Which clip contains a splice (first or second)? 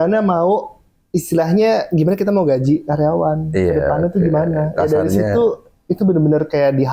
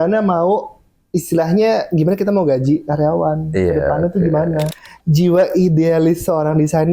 second